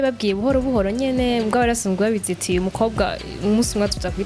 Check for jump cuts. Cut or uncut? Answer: uncut